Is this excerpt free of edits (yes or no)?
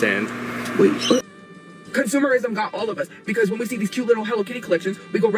no